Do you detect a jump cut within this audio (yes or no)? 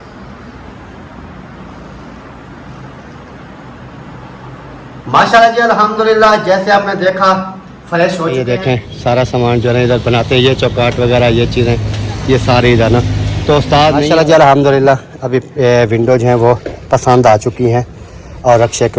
yes